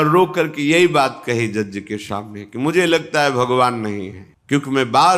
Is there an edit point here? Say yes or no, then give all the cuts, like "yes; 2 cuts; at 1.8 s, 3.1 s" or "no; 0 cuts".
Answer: no; 0 cuts